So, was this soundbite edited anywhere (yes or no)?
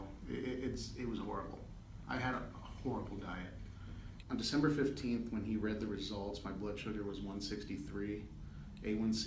yes